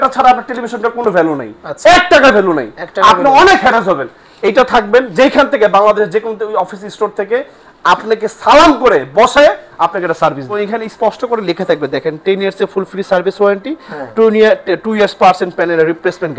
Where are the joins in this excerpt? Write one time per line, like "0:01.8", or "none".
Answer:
0:10.5